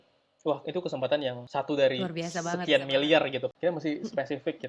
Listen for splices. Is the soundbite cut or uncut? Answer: cut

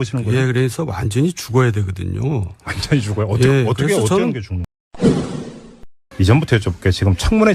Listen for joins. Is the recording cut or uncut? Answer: uncut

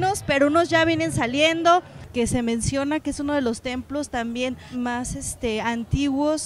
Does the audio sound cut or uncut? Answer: cut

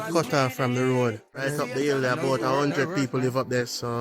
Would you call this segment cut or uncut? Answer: cut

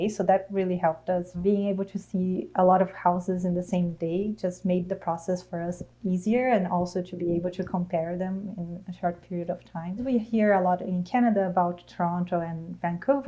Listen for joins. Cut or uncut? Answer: cut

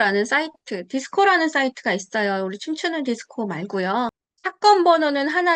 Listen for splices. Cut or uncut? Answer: cut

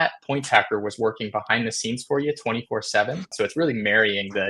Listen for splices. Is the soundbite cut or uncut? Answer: cut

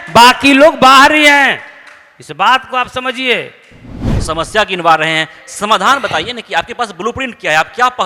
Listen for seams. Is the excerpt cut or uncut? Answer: cut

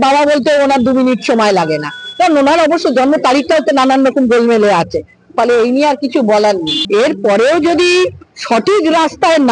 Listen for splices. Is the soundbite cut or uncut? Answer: cut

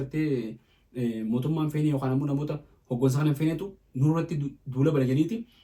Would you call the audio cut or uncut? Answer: uncut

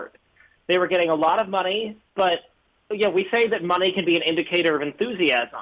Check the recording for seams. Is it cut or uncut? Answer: uncut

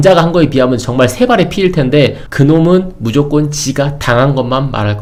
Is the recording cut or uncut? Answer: uncut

